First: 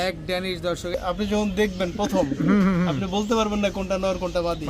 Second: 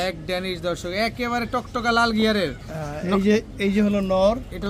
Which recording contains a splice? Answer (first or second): first